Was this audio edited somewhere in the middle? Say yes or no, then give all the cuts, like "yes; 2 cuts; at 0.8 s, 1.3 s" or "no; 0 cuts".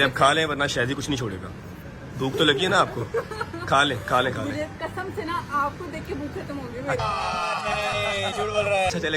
no; 0 cuts